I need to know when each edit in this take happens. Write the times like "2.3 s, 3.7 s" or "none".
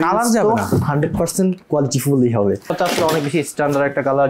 2.7 s